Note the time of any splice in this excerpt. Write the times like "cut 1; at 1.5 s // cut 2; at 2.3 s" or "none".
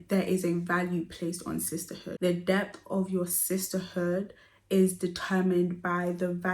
cut 1; at 2.1 s